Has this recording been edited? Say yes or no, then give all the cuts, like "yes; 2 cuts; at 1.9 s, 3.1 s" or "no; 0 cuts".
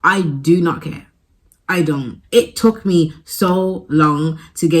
yes; 1 cut; at 2.1 s